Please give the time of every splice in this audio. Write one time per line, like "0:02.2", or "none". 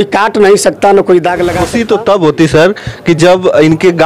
0:01.7